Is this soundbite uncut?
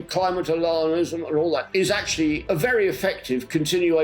no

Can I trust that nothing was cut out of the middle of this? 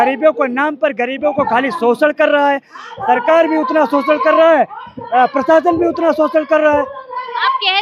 yes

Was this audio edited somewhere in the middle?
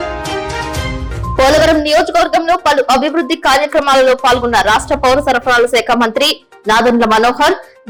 no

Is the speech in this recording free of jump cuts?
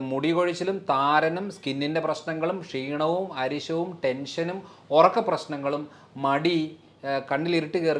yes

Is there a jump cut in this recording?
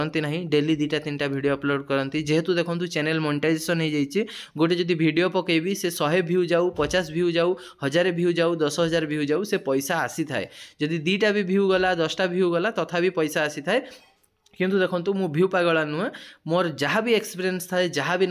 no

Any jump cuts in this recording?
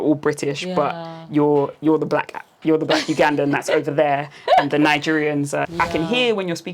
yes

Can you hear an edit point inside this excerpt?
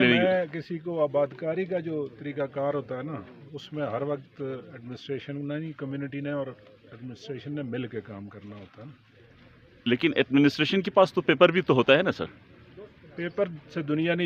yes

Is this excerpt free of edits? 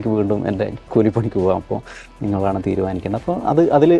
yes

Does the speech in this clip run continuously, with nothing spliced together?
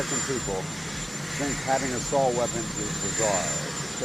yes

